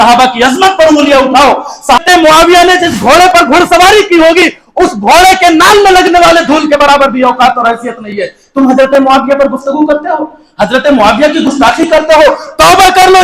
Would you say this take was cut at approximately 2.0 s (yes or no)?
yes